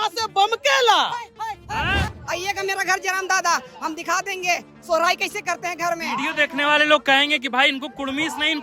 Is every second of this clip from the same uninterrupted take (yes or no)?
no